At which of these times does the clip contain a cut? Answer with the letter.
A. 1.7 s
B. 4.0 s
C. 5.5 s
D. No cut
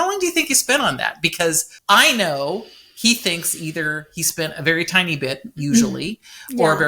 A